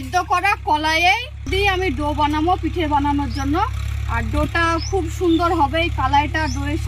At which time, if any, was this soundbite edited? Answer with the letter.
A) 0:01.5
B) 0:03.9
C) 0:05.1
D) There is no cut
A